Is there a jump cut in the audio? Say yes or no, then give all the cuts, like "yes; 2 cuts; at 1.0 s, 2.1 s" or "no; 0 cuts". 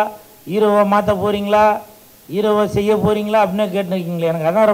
no; 0 cuts